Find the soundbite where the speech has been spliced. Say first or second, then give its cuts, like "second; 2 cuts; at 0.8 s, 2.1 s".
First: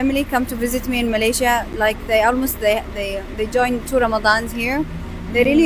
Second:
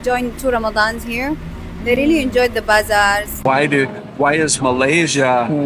second; 1 cut; at 3.4 s